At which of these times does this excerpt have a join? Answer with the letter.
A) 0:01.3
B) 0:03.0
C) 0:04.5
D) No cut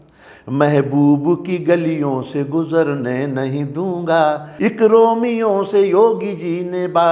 C